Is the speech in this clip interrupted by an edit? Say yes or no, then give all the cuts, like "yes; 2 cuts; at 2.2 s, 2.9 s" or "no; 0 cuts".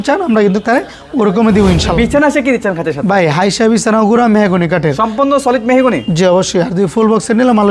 yes; 1 cut; at 1.9 s